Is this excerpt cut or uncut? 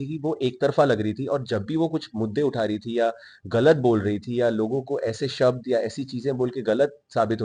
uncut